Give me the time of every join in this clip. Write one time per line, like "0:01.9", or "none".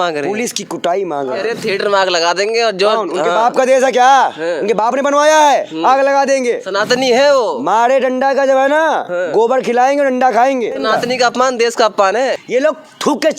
0:01.4
0:06.7
0:10.8
0:12.4